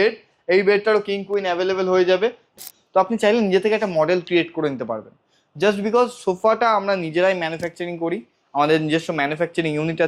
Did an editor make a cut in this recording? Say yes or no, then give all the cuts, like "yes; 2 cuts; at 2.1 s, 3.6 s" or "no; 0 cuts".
yes; 1 cut; at 2.5 s